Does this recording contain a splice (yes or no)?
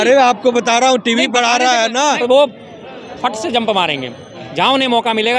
yes